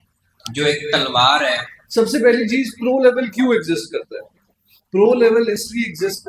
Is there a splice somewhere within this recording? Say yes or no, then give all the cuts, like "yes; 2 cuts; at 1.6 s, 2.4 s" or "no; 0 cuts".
yes; 1 cut; at 1.7 s